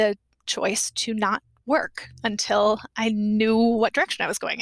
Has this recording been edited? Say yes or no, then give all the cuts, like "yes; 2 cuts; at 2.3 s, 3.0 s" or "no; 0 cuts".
no; 0 cuts